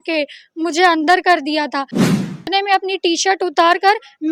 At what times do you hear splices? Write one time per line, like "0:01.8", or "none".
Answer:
0:02.3